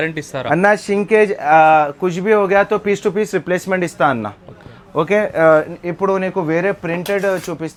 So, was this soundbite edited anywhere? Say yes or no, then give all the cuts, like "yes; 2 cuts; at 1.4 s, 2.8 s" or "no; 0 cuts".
no; 0 cuts